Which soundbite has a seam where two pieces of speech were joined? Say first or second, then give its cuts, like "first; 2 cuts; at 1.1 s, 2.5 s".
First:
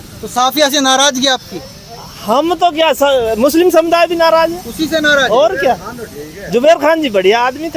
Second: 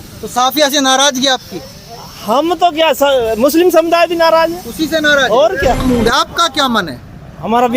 second; 1 cut; at 5.8 s